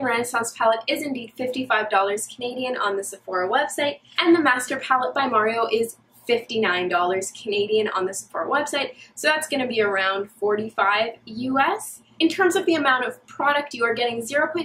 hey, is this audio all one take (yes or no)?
no